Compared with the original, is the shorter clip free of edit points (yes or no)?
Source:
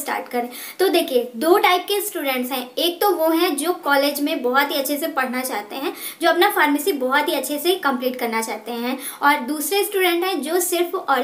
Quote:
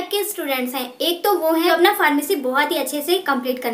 no